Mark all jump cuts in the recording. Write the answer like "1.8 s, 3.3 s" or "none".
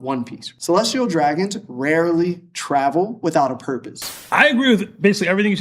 4.1 s